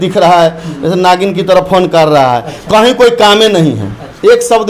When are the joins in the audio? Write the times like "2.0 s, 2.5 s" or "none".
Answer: none